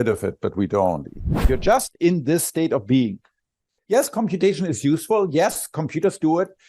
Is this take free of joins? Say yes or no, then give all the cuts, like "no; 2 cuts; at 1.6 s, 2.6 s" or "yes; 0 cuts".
no; 1 cut; at 1.5 s